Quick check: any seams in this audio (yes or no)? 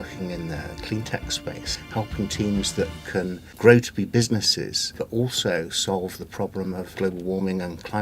yes